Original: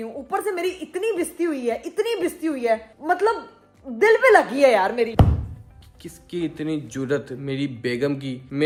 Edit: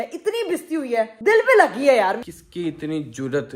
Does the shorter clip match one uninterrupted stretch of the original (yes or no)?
no